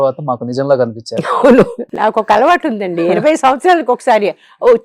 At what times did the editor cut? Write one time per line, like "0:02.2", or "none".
0:01.8